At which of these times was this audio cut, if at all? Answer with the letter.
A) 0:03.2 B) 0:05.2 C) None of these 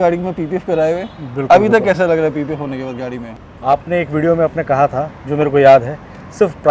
A